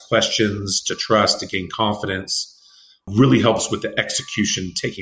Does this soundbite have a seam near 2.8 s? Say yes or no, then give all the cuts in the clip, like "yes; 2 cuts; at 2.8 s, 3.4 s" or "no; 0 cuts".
no; 0 cuts